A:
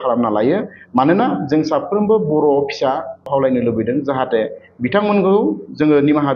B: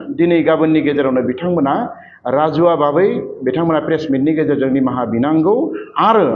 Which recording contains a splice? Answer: A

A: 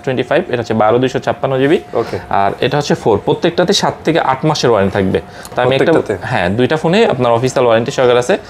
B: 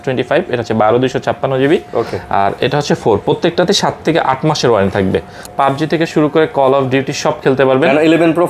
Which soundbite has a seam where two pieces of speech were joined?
B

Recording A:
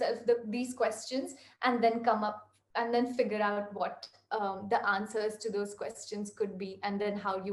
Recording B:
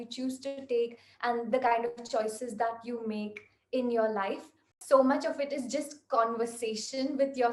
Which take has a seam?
B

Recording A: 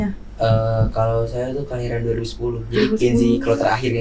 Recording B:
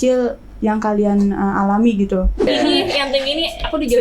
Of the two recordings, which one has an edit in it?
B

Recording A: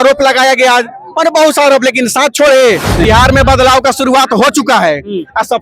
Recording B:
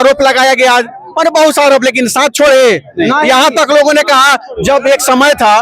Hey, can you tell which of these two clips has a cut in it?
A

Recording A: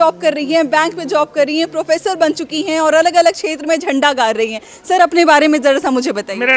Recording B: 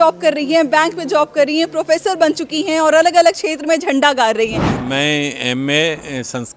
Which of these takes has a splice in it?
B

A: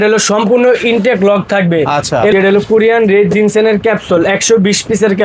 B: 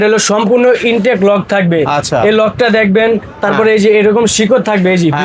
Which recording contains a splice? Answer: A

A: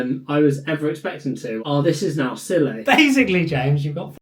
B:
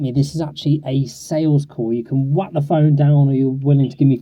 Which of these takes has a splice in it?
A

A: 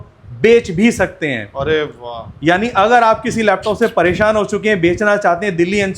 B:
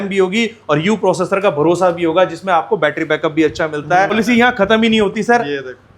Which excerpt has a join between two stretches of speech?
B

